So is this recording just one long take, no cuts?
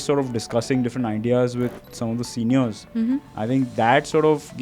no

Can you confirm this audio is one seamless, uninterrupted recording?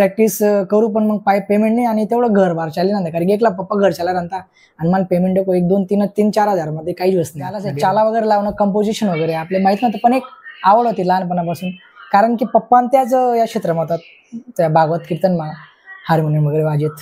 no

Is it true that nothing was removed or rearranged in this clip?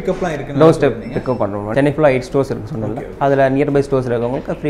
no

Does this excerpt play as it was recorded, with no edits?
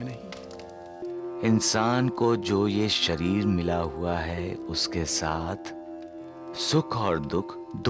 no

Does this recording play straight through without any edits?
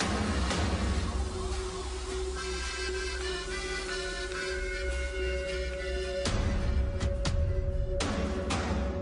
yes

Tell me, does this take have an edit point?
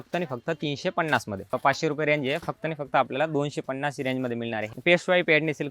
yes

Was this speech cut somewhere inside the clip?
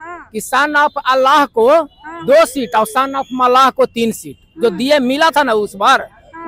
no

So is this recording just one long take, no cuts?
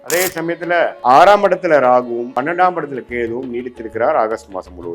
no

